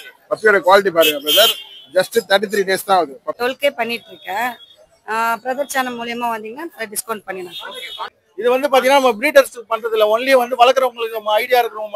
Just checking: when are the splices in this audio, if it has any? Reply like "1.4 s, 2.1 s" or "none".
3.2 s, 8.2 s